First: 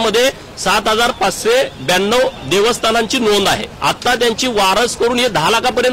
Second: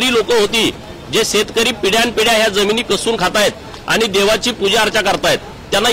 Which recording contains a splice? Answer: first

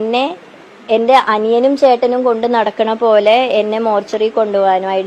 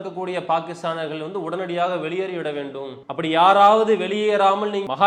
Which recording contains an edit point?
second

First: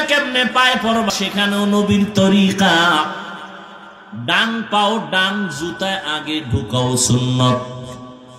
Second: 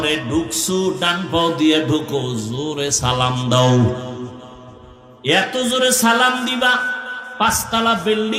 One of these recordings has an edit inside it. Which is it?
first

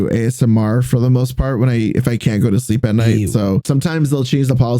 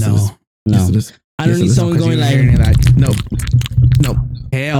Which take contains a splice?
first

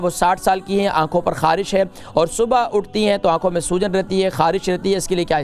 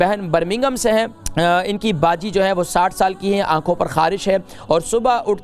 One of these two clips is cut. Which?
second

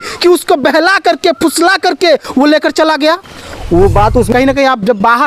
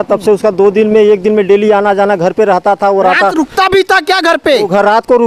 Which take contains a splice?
first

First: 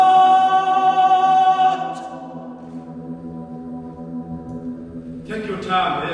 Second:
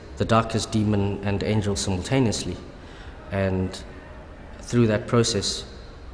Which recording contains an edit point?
first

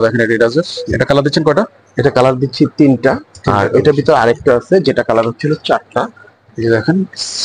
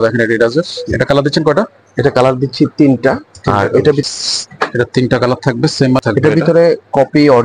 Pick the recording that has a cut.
second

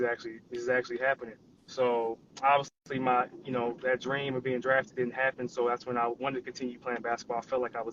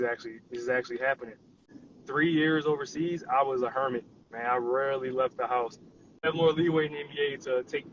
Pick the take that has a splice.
second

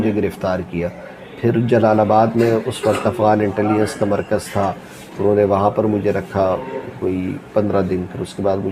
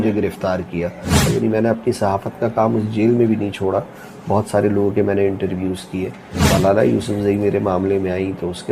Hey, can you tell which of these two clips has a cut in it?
second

